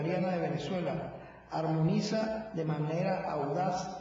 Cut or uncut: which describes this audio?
cut